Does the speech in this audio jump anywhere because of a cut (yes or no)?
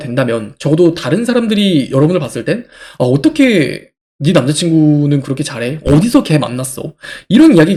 no